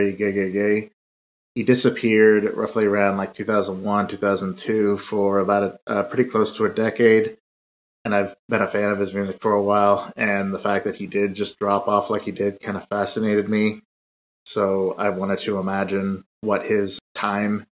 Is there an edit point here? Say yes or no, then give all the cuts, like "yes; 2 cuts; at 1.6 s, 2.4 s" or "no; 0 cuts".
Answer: yes; 1 cut; at 16.6 s